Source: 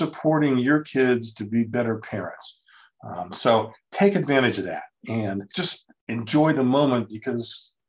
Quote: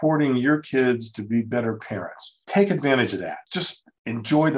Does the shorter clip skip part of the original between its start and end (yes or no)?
yes